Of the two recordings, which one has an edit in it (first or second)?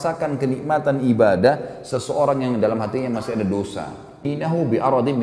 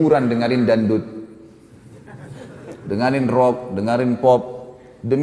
first